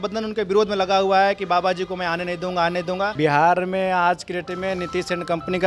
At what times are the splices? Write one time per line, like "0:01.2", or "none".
0:03.1